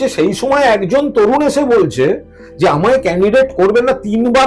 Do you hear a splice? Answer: no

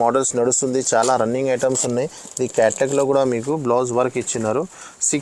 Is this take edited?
no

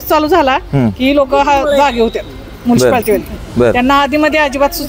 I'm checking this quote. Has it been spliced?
no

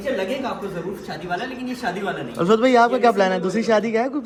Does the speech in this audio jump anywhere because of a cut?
no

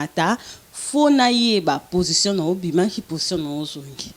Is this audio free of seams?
yes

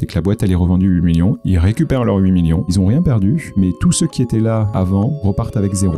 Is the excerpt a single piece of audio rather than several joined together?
no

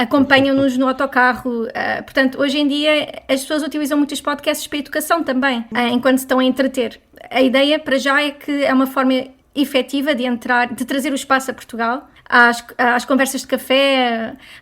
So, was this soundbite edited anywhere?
yes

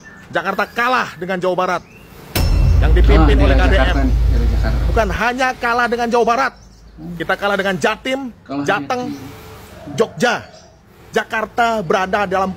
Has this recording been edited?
no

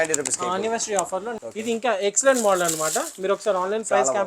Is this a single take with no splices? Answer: no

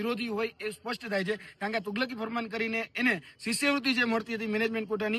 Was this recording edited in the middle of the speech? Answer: no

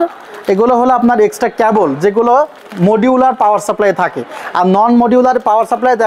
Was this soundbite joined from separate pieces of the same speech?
no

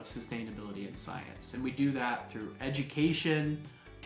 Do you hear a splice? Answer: no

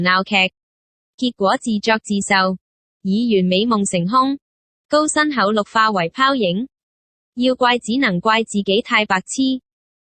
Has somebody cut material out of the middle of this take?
no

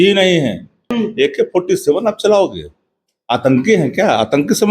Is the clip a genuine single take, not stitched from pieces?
no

